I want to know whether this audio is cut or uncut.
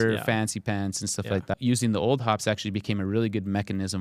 cut